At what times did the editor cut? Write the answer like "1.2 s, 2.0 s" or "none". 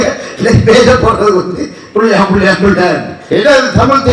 3.1 s